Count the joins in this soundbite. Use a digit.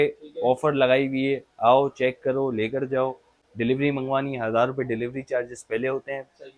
0